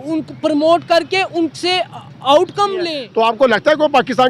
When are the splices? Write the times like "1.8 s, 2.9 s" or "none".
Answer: 3.0 s